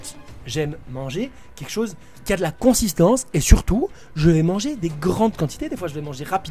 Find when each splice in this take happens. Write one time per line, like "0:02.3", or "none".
0:02.1

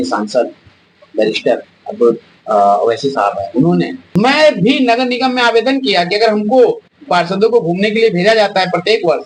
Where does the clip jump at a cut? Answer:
0:04.1

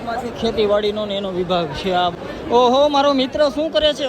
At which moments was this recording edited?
0:02.1

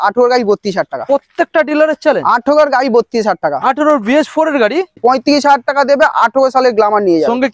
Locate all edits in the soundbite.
0:04.9

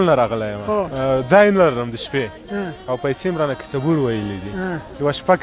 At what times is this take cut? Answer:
0:00.9

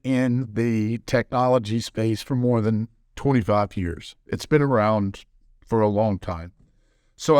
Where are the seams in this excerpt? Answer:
none

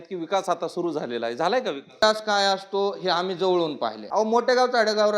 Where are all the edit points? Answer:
0:02.0
0:04.0

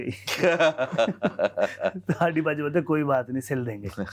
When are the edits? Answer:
none

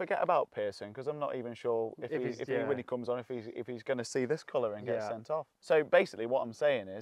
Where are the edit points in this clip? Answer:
0:05.5

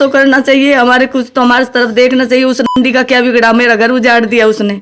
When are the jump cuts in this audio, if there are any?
none

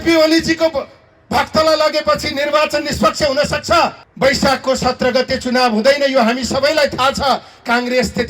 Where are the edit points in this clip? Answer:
0:04.0

